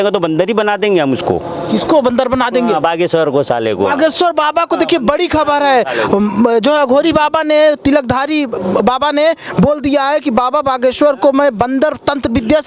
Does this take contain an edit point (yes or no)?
no